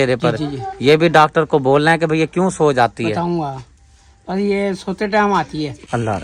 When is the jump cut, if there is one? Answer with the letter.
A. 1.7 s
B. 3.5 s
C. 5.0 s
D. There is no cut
D